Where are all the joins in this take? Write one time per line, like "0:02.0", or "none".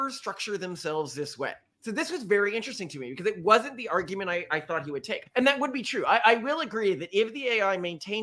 0:01.8
0:05.2